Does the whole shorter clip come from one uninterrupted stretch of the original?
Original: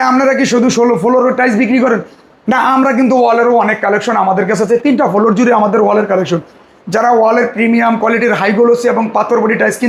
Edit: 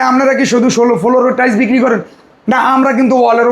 yes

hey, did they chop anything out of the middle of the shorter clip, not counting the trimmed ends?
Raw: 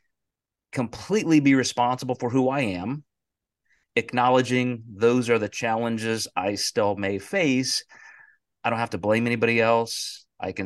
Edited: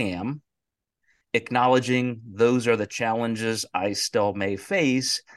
no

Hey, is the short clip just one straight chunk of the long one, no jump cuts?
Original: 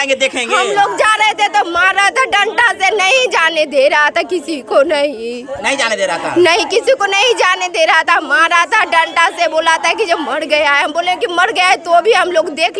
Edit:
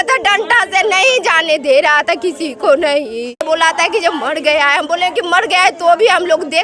no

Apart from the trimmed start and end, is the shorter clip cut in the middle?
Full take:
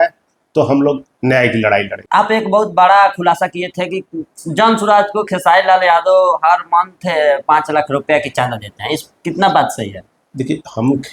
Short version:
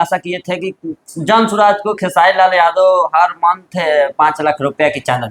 no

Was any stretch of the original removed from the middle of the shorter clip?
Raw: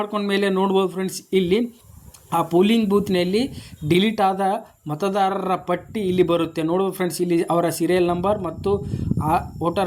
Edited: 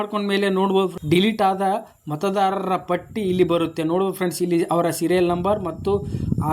yes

